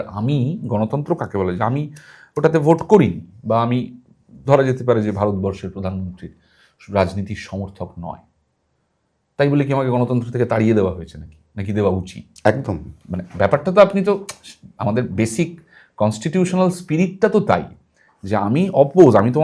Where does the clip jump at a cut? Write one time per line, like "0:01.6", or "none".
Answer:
none